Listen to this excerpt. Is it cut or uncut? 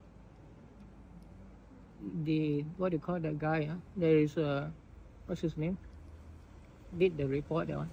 uncut